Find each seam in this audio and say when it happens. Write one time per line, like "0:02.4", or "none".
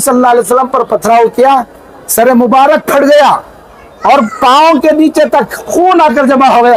none